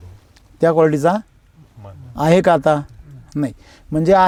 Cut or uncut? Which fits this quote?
uncut